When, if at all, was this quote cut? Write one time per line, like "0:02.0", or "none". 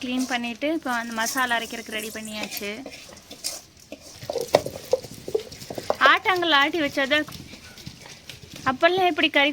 0:07.3